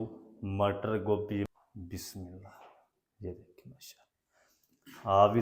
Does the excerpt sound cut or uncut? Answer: cut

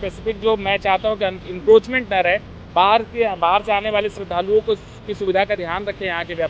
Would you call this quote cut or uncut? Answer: uncut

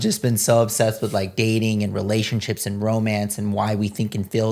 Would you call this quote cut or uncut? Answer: uncut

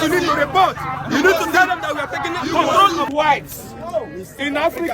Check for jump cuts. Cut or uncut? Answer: cut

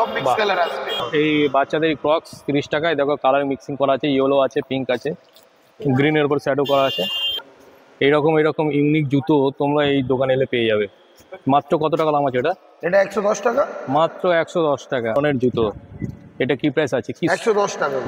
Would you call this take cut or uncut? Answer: cut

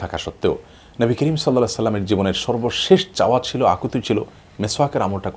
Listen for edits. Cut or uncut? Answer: uncut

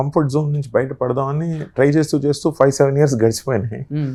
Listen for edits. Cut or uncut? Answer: uncut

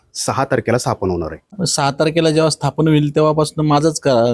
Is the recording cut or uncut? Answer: cut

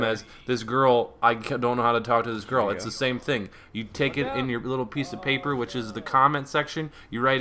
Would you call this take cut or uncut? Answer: cut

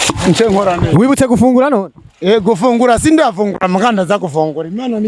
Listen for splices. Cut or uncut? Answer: uncut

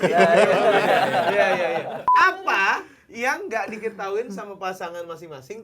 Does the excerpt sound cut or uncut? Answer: cut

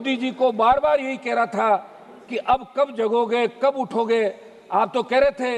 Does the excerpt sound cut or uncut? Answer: uncut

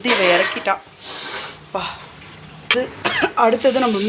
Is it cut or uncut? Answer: cut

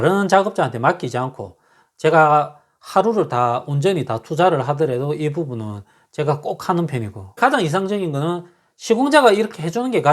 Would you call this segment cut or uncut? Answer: cut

